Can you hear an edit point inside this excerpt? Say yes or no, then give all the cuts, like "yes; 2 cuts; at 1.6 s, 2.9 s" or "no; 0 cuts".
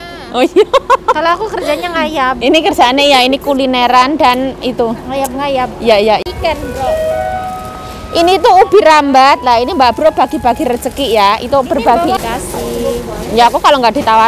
yes; 2 cuts; at 6.2 s, 12.2 s